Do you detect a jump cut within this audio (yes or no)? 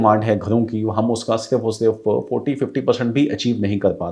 no